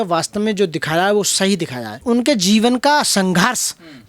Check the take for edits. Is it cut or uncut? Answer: cut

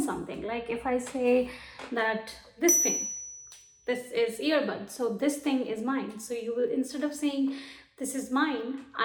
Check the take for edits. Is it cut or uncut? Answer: uncut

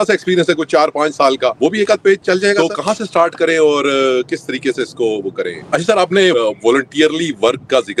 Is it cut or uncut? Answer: cut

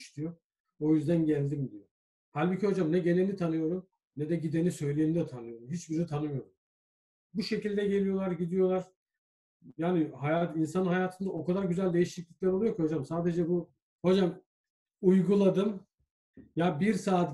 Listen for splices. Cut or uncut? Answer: cut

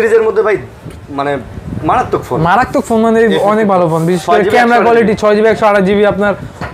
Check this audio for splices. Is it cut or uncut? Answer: uncut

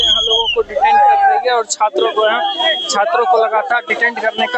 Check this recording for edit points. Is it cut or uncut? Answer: uncut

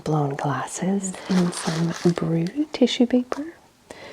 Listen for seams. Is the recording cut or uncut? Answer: cut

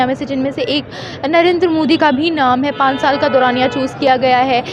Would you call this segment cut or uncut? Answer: uncut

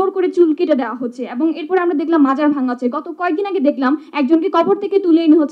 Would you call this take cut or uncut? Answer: uncut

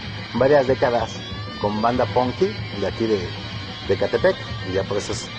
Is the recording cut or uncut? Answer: uncut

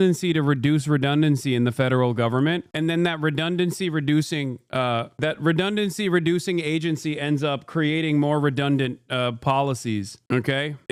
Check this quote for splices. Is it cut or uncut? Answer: uncut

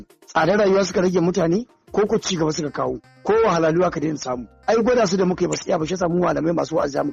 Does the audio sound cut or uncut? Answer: uncut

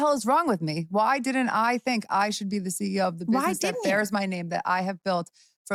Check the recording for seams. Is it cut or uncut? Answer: uncut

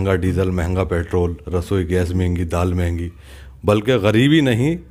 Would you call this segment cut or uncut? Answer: uncut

